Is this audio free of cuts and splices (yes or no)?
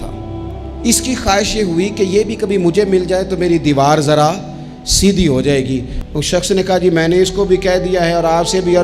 no